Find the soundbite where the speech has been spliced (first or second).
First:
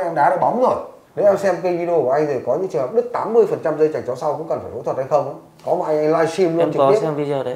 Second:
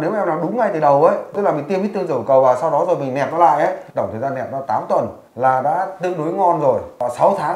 first